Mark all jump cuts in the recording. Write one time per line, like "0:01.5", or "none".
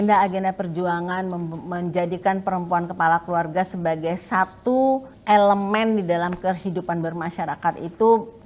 0:05.1